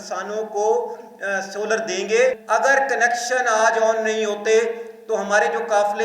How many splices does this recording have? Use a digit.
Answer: 1